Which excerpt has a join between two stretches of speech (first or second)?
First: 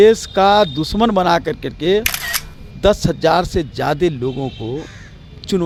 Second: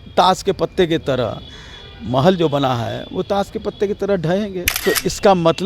second